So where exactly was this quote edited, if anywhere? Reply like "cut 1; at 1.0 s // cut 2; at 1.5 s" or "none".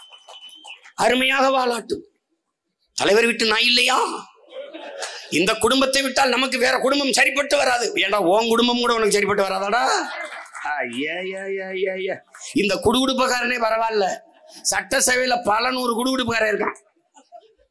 none

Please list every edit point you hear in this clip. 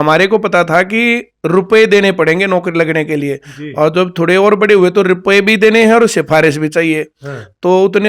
none

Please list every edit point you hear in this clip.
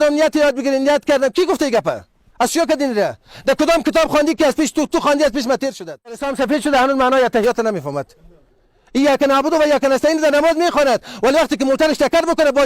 cut 1; at 6.3 s

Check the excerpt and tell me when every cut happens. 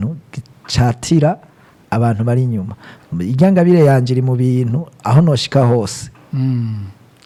none

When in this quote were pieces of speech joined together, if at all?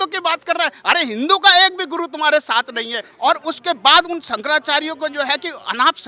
cut 1; at 3.0 s

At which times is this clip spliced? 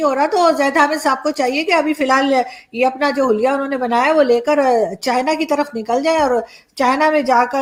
none

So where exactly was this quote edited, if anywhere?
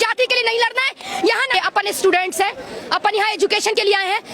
cut 1; at 1.6 s

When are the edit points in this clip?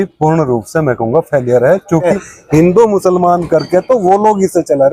cut 1; at 2.1 s

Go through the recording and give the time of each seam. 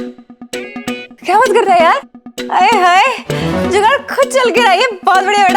cut 1; at 1.2 s

